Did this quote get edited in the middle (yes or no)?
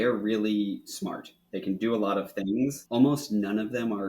yes